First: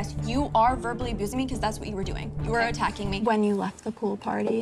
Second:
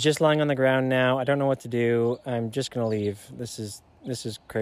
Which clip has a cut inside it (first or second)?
first